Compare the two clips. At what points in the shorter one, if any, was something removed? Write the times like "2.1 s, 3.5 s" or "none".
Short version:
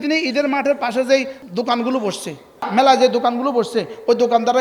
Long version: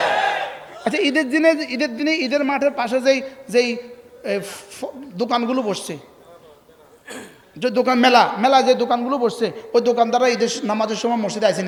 1.4 s, 2.7 s

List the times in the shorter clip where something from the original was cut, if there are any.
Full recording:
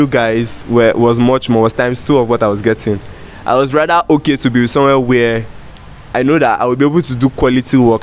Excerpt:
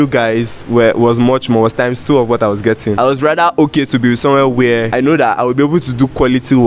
3.0 s, 4.9 s

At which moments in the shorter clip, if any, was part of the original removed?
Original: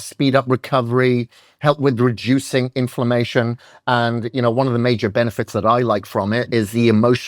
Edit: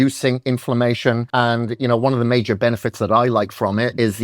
1.2 s

